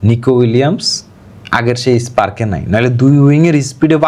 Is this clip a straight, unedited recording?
yes; 0 cuts

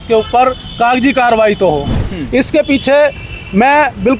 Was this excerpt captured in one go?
no; 1 cut; at 2.0 s

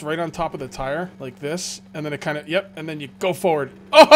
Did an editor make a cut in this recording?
yes; 1 cut; at 1.2 s

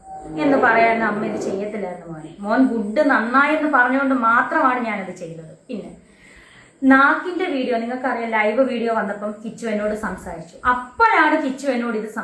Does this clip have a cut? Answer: no; 0 cuts

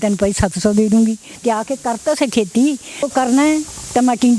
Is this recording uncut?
no; 1 cut; at 3.1 s

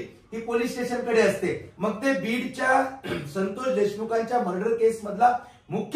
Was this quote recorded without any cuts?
no; 1 cut; at 1.7 s

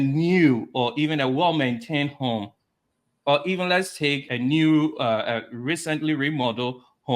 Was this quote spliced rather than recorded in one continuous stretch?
no; 0 cuts

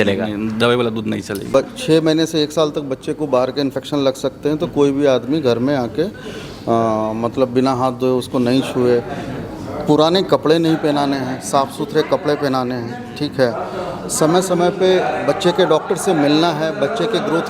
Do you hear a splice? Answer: yes; 1 cut; at 1.4 s

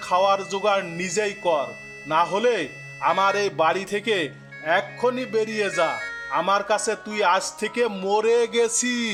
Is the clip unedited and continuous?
yes; 0 cuts

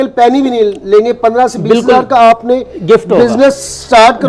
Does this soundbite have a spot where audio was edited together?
no; 0 cuts

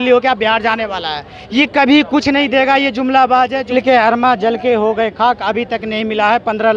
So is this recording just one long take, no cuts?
no; 1 cut; at 3.6 s

